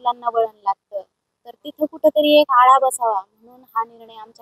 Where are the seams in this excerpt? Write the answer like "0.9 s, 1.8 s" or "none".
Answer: none